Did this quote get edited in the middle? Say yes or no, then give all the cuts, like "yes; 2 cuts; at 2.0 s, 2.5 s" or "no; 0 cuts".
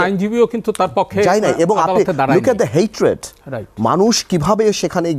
no; 0 cuts